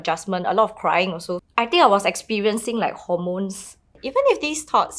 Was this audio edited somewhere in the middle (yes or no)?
yes